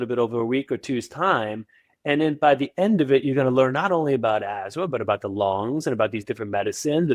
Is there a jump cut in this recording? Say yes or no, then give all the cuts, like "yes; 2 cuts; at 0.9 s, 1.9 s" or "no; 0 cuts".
no; 0 cuts